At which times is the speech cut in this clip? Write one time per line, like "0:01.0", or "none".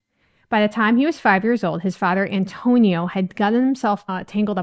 none